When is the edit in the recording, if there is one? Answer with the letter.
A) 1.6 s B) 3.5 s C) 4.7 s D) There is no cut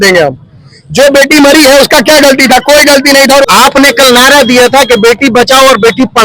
B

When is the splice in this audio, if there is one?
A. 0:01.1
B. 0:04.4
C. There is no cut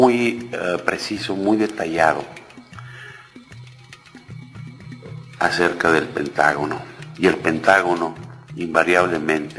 C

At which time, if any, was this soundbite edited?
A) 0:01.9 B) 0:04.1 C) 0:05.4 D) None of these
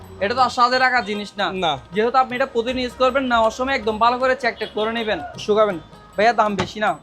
C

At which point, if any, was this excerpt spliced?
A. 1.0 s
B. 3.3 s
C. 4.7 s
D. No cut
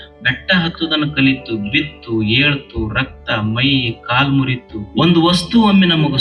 C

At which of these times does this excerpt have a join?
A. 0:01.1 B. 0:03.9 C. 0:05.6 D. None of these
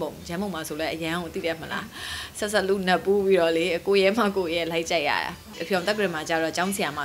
C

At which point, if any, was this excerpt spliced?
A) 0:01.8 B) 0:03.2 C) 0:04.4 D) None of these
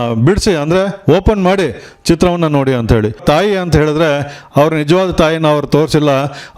B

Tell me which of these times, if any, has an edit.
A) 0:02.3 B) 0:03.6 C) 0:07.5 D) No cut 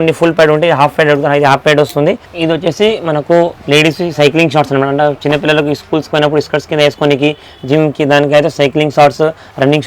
A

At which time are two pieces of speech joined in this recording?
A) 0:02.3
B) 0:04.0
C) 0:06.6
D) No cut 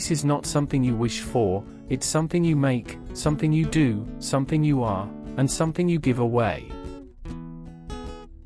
C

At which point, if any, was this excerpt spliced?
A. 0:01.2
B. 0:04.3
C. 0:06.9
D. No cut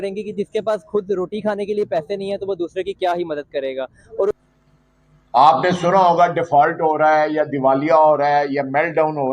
B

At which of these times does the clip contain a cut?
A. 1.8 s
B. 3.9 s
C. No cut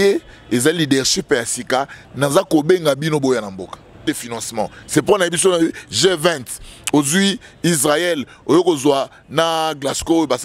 B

